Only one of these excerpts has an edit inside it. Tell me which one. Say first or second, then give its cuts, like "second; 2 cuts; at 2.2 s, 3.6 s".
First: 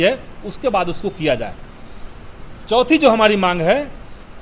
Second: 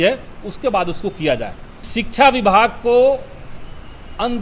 second; 1 cut; at 1.9 s